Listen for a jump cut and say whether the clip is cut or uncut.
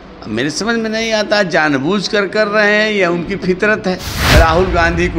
cut